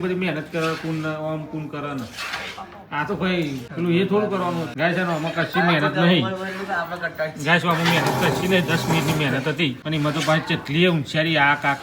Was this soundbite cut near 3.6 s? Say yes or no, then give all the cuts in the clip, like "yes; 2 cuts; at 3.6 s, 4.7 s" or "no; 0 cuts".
yes; 3 cuts; at 3.6 s, 4.7 s, 9.8 s